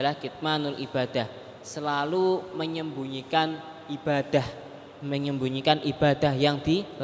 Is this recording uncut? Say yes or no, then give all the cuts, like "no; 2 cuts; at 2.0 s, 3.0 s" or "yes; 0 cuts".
yes; 0 cuts